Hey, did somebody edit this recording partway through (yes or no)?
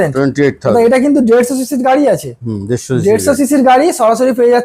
no